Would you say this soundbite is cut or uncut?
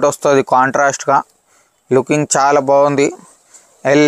uncut